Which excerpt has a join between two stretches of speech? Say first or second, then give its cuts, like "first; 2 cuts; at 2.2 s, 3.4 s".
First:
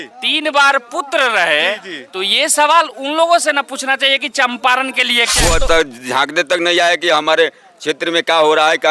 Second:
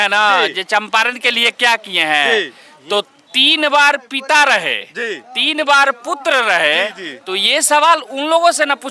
first; 1 cut; at 5.3 s